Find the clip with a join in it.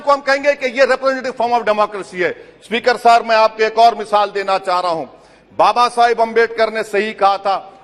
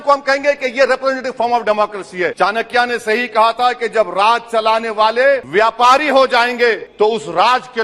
second; 3 cuts; at 2.3 s, 5.4 s, 6.9 s

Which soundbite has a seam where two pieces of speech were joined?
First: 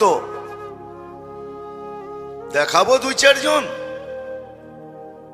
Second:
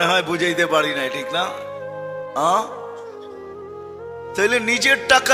second; 2 cuts; at 2.8 s, 4.4 s

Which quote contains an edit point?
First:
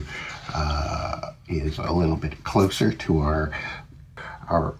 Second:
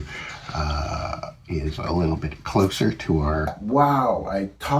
second; 1 cut; at 3.5 s

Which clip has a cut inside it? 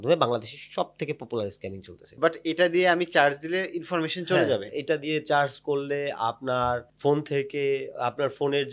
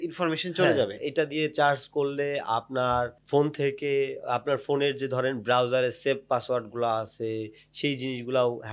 first; 1 cut; at 2.0 s

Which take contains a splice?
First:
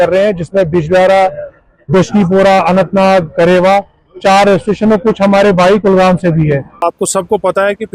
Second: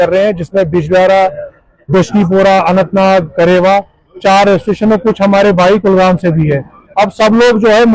first; 1 cut; at 6.7 s

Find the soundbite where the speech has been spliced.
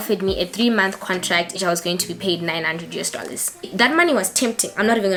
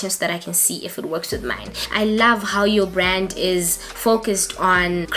second; 1 cut; at 1.6 s

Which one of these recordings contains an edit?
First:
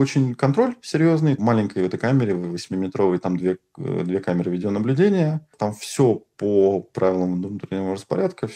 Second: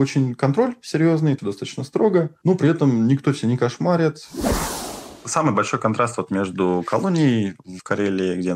second; 2 cuts; at 1.4 s, 4.8 s

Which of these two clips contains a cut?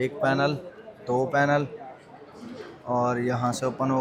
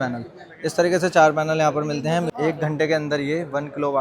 second; 1 cut; at 2.3 s

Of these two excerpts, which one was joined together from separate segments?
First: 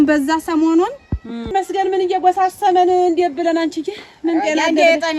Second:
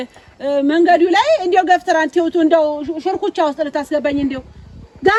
first; 1 cut; at 1.5 s

